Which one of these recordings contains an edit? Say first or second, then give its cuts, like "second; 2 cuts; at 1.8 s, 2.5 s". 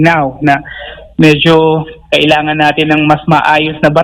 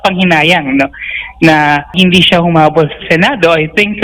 second; 1 cut; at 1.9 s